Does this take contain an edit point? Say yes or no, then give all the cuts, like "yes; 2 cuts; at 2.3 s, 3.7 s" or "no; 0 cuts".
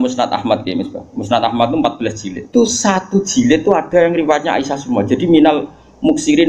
yes; 1 cut; at 2.5 s